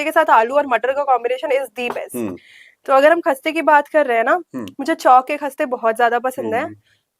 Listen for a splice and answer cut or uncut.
uncut